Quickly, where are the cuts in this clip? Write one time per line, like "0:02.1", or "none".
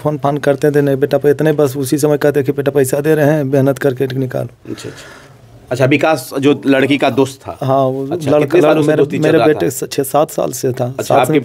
0:05.5